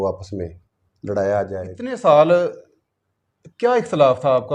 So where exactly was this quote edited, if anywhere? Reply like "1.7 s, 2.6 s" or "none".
1.8 s